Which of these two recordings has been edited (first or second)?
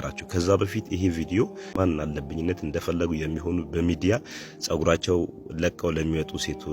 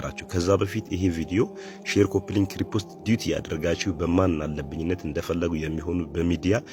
first